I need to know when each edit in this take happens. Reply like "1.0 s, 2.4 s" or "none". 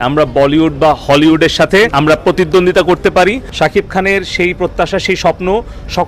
1.9 s, 3.5 s